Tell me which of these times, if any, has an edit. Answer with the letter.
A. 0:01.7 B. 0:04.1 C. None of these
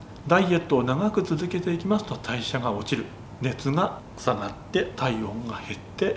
B